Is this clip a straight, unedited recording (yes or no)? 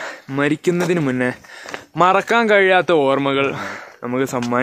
yes